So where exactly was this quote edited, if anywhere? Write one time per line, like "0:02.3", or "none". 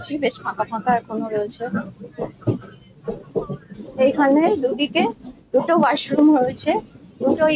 0:03.7